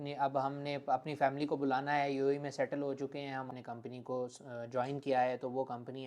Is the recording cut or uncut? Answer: cut